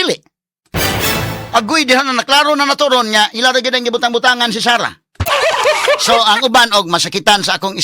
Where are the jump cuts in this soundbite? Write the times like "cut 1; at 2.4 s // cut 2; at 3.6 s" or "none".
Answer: cut 1; at 5.3 s